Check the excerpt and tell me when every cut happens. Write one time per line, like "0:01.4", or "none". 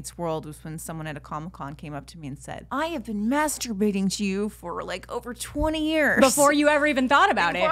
0:02.5